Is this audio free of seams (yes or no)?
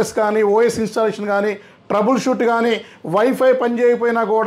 yes